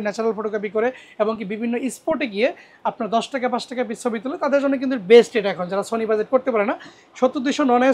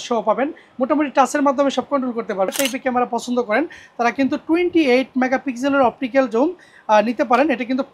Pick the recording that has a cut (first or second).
second